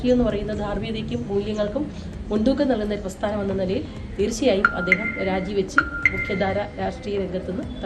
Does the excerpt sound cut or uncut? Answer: cut